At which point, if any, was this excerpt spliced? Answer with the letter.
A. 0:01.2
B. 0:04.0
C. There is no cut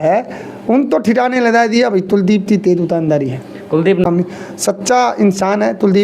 B